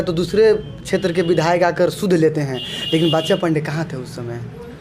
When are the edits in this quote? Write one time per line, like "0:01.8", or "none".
none